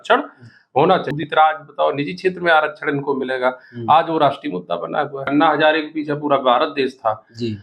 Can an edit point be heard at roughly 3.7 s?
no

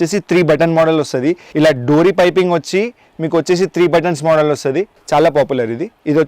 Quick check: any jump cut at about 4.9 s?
yes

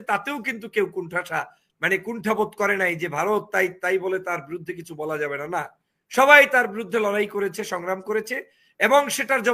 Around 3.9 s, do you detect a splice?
no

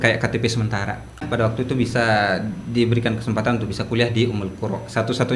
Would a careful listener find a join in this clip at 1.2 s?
yes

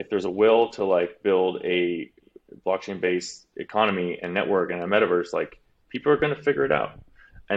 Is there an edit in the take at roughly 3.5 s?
yes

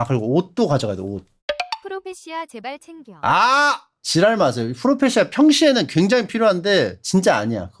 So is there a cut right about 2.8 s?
no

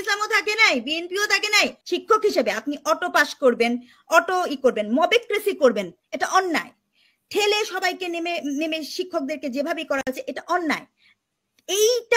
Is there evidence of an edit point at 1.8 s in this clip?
yes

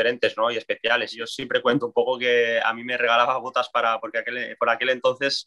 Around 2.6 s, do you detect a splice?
no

